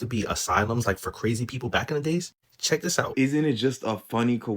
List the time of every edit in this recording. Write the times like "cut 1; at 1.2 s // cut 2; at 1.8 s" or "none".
cut 1; at 3.1 s